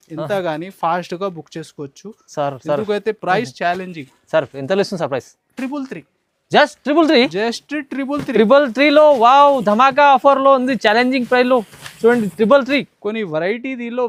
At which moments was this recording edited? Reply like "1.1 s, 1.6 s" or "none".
none